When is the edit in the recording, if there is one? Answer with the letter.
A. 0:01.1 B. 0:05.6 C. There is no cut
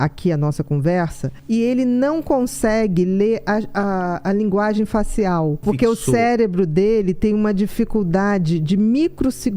B